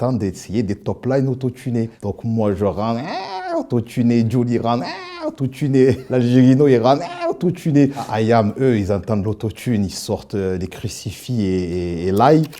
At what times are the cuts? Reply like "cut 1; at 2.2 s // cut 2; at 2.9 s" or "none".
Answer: cut 1; at 2.0 s // cut 2; at 6.0 s